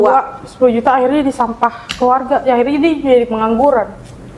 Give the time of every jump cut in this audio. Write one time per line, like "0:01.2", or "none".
none